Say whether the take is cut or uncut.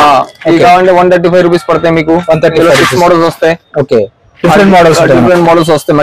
uncut